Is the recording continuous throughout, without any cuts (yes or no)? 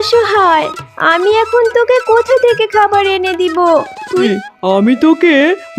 no